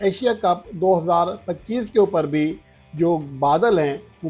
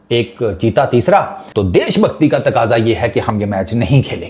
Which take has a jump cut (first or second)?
second